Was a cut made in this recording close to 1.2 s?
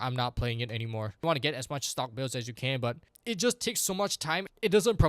yes; 1 cut; at 1.2 s

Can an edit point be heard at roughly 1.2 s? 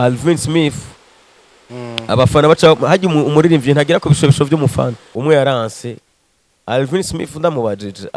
no; 1 cut; at 5.0 s

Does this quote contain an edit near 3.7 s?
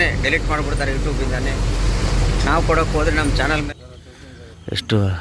yes; 1 cut; at 3.7 s

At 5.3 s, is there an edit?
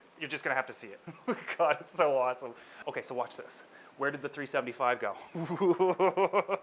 no; 1 cut; at 2.7 s

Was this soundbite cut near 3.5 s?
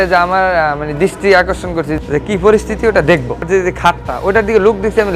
yes; 2 cuts; at 1.9 s, 3.5 s

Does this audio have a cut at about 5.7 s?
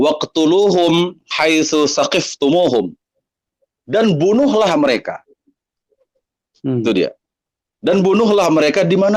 no; 0 cuts

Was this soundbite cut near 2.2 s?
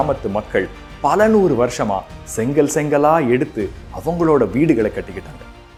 no; 0 cuts

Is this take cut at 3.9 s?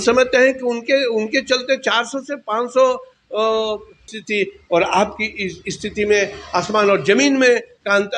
yes; 1 cut; at 3.9 s

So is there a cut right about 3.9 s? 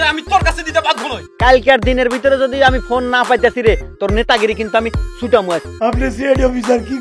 no; 2 cuts; at 1.2 s, 5.8 s

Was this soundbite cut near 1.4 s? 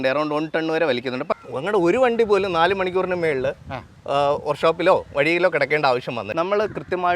yes; 2 cuts; at 1.4 s, 6.2 s

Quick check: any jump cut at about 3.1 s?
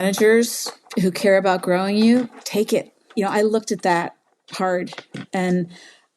yes; 1 cut; at 3.1 s

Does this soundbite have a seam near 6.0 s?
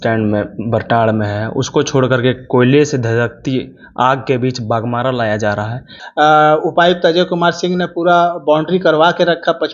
yes; 1 cut; at 6.0 s

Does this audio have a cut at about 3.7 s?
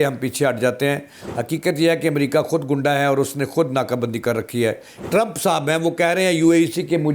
no; 2 cuts; at 1.2 s, 4.9 s

